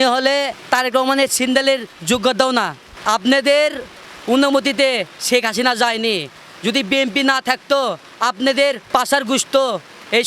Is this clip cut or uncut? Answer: cut